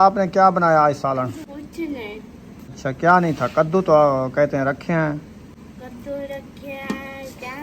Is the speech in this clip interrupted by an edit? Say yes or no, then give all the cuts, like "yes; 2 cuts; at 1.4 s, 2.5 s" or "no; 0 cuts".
yes; 2 cuts; at 1.4 s, 2.8 s